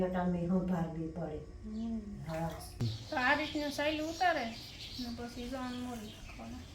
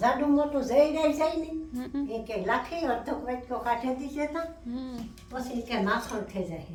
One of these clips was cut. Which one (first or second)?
first